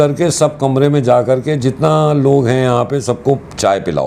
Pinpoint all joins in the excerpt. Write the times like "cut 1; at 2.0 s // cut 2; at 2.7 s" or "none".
none